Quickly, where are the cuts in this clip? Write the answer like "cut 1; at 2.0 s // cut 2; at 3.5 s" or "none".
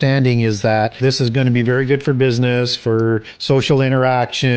cut 1; at 1.0 s // cut 2; at 3.3 s